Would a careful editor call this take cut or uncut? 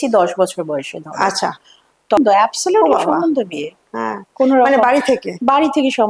cut